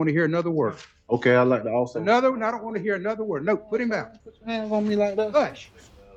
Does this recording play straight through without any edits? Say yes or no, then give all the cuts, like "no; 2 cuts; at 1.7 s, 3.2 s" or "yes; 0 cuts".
yes; 0 cuts